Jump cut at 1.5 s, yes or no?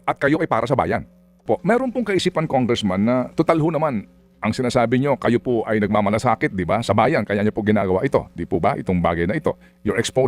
yes